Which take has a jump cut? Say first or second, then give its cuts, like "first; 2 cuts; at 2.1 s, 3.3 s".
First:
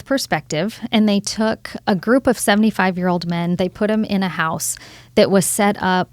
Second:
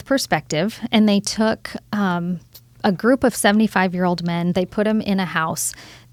first; 1 cut; at 1.7 s